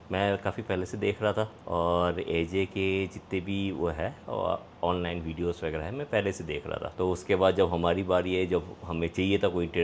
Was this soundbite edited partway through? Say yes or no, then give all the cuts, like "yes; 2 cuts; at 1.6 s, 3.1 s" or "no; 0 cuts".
no; 0 cuts